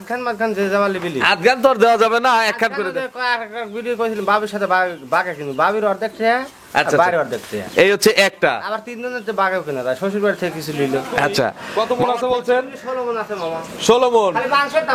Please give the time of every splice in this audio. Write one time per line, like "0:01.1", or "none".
0:11.6